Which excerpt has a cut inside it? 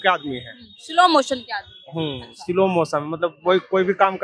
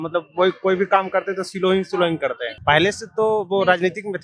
second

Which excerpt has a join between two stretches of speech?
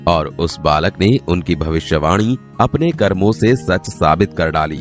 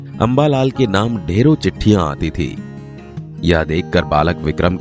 first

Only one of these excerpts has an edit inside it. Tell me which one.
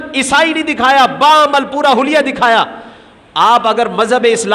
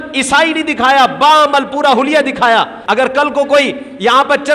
second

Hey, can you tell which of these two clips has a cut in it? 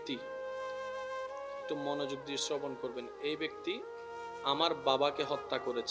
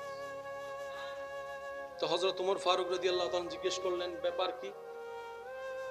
second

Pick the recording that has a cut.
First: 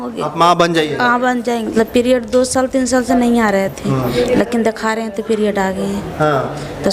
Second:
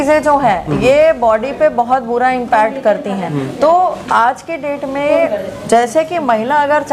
first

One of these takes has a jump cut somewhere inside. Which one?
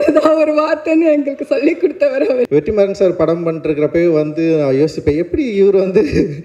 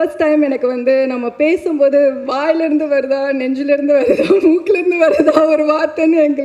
first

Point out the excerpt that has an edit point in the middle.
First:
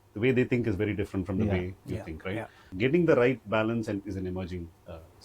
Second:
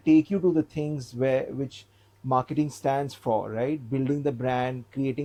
first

